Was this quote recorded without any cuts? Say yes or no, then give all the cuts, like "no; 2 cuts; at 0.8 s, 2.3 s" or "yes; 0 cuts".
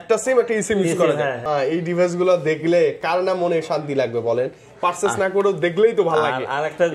no; 1 cut; at 1.5 s